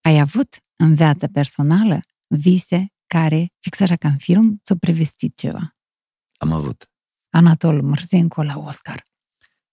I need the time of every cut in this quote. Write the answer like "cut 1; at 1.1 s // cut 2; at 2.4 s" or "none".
cut 1; at 3.6 s // cut 2; at 7.2 s